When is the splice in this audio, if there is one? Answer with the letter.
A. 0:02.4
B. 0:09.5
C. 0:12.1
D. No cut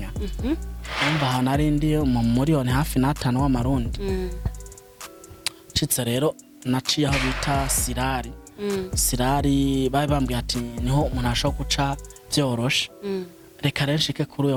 D